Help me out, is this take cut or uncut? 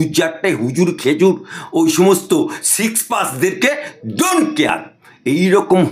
uncut